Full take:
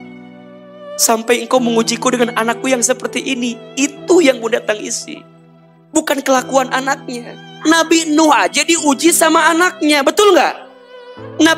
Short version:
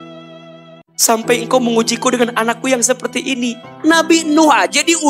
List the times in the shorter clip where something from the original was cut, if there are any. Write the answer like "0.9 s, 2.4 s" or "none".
3.6 s